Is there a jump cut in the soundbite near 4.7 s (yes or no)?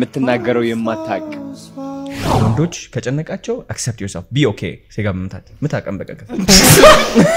no